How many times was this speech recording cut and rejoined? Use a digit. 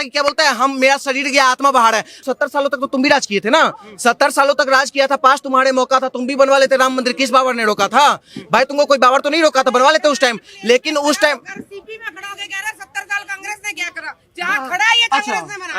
1